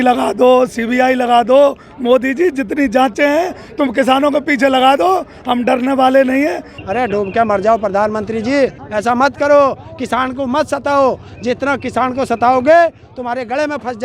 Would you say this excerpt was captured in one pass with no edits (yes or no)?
no